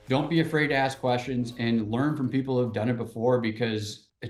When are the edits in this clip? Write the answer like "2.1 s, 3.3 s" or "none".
none